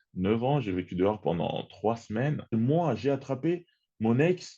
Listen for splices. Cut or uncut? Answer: cut